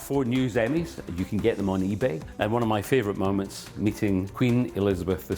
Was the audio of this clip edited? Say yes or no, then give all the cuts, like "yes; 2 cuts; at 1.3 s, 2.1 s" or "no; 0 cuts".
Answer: yes; 2 cuts; at 2.3 s, 4.3 s